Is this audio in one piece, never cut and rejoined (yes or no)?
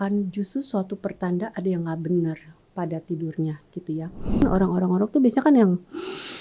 no